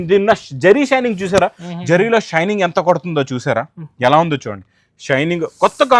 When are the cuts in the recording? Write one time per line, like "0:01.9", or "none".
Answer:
none